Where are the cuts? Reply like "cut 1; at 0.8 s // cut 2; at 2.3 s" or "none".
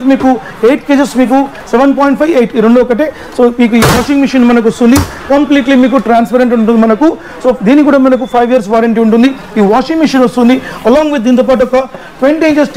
none